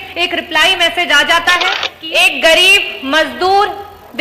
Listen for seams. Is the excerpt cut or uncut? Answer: cut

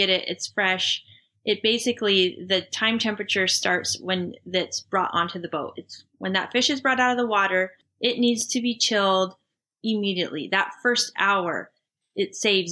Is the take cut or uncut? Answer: uncut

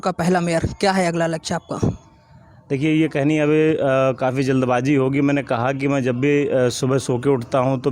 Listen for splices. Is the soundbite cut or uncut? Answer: uncut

